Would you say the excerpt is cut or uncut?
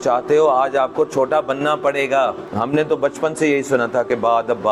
cut